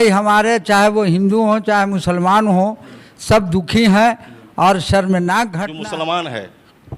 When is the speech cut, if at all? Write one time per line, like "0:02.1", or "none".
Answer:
0:05.6